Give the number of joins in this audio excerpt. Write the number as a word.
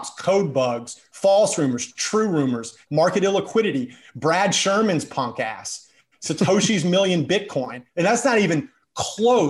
three